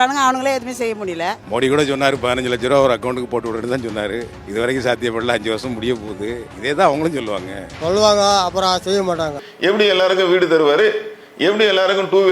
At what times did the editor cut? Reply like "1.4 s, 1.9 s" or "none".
9.4 s